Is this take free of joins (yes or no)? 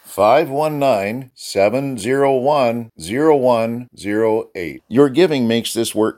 yes